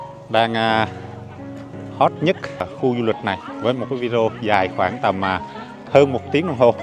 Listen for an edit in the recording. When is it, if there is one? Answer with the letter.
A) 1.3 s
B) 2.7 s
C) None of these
B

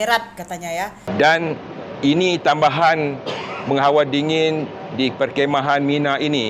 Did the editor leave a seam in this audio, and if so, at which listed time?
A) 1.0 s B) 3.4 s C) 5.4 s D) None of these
A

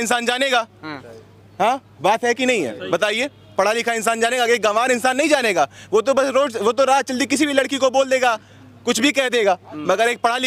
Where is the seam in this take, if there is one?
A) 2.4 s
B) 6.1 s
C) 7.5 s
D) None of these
D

